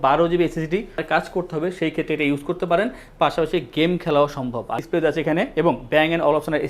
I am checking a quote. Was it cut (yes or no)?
yes